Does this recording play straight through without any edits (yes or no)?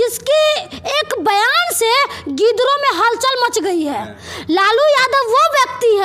yes